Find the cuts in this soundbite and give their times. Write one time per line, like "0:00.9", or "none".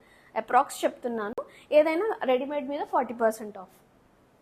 none